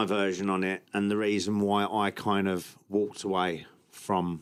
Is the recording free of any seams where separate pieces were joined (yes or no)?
yes